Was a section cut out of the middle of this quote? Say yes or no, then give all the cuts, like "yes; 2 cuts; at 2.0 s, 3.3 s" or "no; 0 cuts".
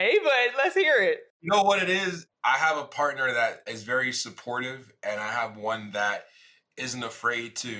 yes; 2 cuts; at 1.3 s, 2.2 s